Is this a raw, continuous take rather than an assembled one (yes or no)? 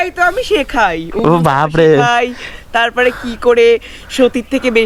yes